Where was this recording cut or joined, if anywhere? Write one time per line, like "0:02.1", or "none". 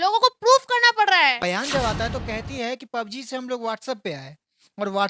0:01.4

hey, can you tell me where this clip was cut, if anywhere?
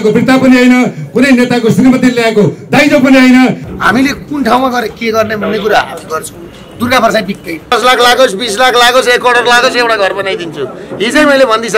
0:03.6
0:07.5

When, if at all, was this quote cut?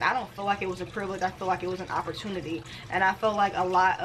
none

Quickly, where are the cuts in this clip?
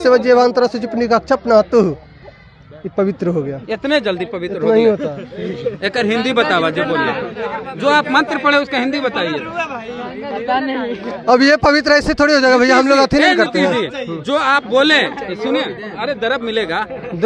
none

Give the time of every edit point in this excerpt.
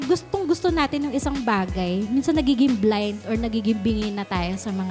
none

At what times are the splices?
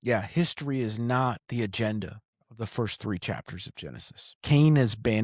0:04.3

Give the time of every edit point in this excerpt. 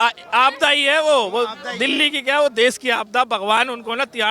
none

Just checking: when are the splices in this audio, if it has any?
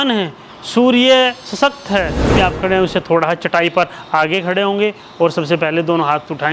0:02.2

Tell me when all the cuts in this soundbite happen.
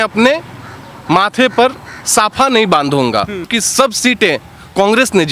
0:03.6

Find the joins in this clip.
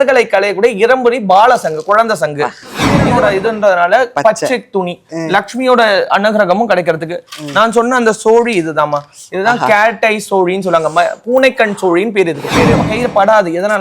0:03.1
0:12.9

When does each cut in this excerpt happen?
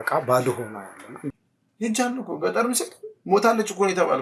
0:01.2

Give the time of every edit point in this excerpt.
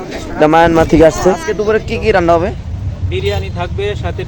0:01.5

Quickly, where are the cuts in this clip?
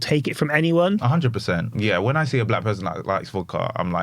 0:01.7

